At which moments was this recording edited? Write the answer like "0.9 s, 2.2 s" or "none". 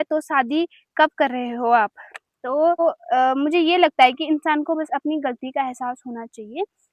2.8 s